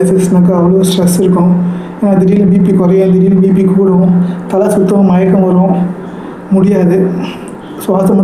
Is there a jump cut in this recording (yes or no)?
no